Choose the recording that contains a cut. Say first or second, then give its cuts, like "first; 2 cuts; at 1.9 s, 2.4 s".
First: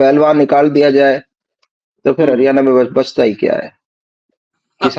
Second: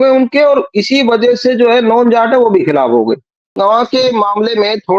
second; 1 cut; at 3.6 s